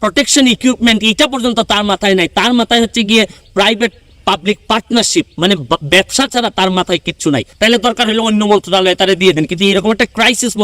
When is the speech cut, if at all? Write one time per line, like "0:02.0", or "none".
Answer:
0:07.5